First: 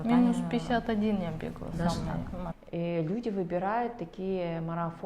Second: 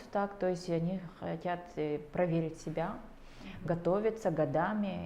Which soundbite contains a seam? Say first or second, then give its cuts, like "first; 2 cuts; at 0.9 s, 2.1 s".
first; 1 cut; at 2.5 s